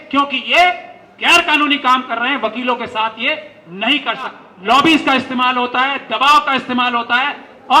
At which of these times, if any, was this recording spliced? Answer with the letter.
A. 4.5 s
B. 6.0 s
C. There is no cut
A